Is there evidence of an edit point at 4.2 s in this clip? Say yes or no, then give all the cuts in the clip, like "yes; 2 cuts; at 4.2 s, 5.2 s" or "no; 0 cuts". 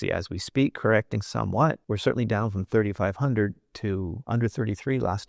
yes; 2 cuts; at 1.8 s, 4.2 s